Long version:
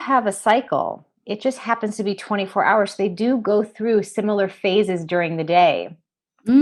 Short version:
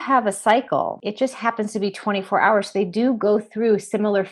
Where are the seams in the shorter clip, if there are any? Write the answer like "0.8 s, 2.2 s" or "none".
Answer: 1.0 s